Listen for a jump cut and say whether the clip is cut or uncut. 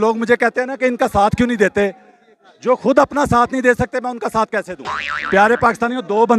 cut